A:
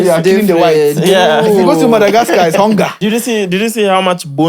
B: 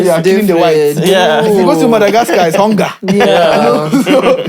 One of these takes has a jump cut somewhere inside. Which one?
A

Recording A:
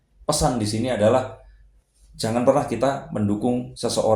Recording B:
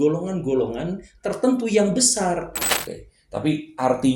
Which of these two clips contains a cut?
B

